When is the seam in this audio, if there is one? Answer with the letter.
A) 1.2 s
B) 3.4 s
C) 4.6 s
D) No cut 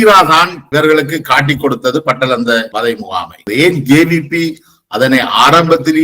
B